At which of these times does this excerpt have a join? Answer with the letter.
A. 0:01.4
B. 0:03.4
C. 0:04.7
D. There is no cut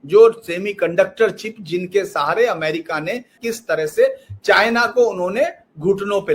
B